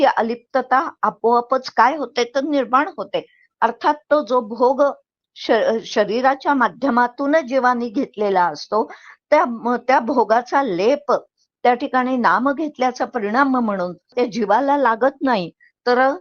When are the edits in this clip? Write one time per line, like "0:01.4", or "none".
0:14.1